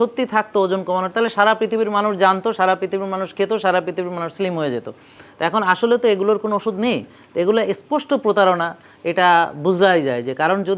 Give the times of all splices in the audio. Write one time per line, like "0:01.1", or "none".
none